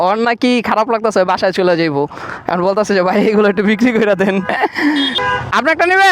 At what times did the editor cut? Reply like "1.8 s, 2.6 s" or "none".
5.2 s